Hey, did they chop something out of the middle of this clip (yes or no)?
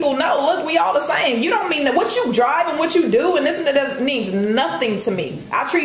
no